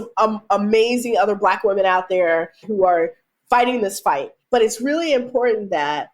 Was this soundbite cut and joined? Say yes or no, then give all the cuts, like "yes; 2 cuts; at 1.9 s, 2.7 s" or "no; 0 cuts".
yes; 2 cuts; at 2.7 s, 4.3 s